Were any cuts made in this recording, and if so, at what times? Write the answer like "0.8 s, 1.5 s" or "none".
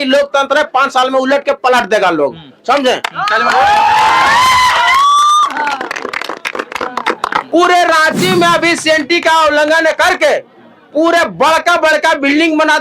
7.5 s